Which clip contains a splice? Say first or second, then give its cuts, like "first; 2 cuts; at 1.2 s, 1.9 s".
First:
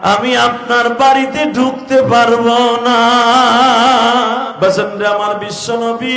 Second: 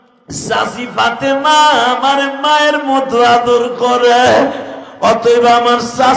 first; 1 cut; at 4.5 s